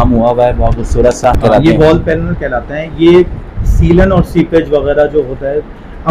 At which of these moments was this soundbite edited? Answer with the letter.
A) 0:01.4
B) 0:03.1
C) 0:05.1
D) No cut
A